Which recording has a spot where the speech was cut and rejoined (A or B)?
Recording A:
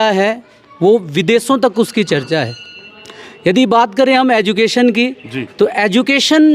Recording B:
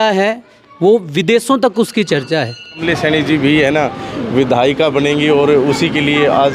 B